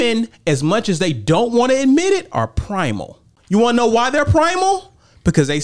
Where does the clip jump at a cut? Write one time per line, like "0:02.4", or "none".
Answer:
0:03.3